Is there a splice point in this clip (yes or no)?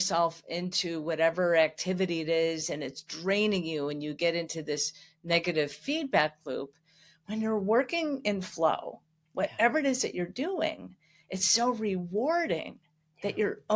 no